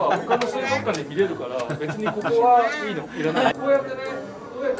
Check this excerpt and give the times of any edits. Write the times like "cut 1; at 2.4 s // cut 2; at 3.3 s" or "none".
cut 1; at 3.6 s